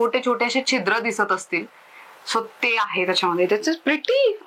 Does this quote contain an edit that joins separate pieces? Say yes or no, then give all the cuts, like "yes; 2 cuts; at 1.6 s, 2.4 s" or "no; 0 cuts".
no; 0 cuts